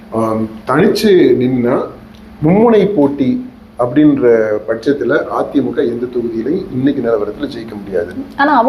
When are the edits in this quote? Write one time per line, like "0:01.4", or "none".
none